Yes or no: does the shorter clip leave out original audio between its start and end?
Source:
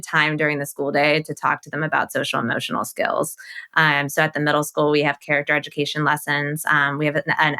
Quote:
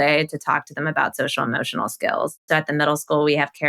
yes